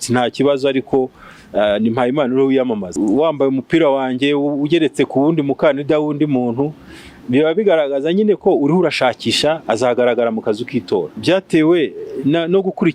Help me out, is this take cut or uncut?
cut